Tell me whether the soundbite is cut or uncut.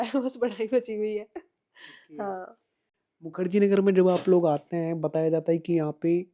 uncut